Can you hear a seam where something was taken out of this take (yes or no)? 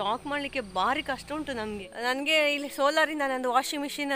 yes